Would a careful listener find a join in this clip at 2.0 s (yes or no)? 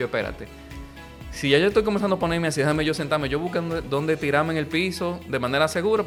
no